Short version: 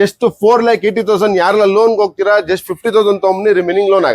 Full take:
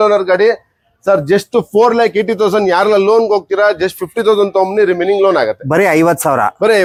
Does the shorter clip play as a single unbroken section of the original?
yes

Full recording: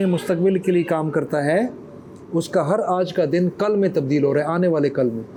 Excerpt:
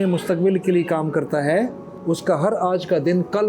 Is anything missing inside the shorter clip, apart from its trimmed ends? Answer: yes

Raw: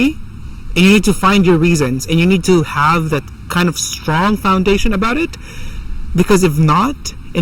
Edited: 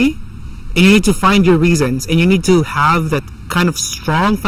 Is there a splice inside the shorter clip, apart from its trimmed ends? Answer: no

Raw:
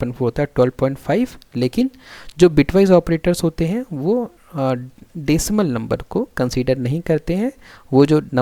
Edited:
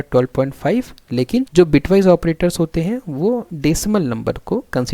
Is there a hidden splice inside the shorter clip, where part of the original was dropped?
yes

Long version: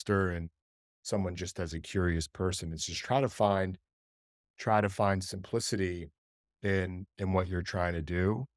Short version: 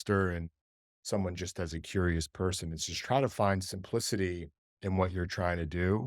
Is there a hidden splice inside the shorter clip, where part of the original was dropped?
yes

